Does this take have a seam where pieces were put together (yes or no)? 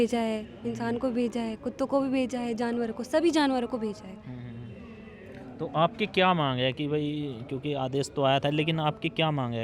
no